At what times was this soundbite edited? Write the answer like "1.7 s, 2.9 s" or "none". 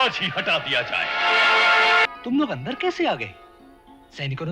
2.0 s